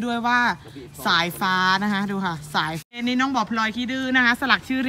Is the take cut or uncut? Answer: cut